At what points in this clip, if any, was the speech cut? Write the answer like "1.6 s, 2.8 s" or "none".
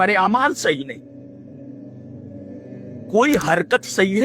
1.6 s, 3.1 s